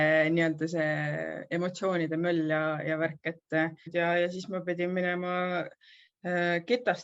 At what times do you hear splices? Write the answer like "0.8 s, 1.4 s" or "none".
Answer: 3.9 s